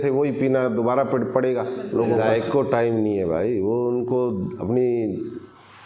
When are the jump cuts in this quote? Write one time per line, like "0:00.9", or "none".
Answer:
0:02.2